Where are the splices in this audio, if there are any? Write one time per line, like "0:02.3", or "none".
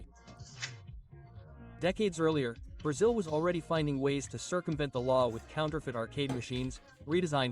0:03.8